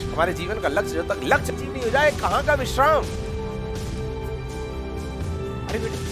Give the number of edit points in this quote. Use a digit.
0